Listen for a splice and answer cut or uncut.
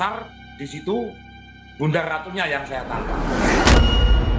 cut